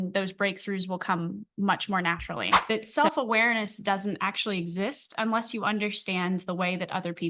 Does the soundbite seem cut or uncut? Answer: cut